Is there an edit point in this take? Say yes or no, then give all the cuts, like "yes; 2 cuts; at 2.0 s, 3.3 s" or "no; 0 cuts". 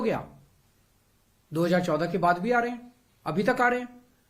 no; 0 cuts